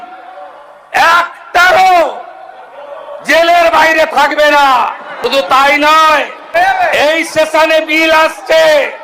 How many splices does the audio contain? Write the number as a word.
two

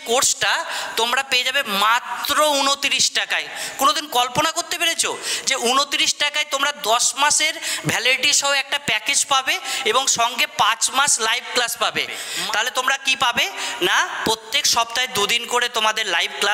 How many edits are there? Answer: one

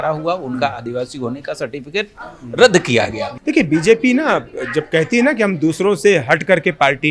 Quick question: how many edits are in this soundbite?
one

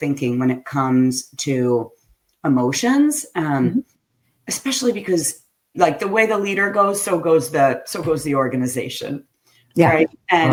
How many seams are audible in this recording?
zero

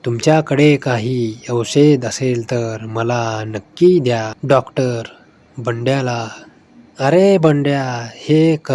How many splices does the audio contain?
one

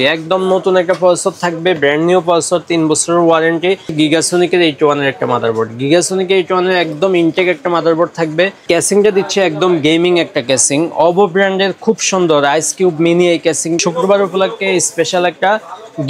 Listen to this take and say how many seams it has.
three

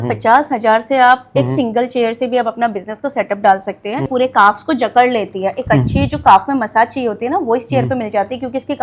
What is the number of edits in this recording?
one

